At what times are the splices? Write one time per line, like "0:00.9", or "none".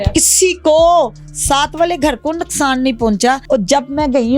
0:03.4